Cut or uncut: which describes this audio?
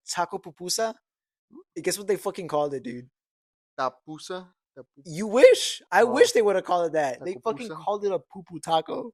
uncut